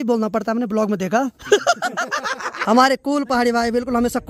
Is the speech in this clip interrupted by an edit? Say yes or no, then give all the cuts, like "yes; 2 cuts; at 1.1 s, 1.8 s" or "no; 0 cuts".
yes; 1 cut; at 2.6 s